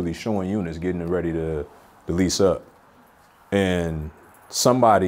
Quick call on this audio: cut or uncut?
uncut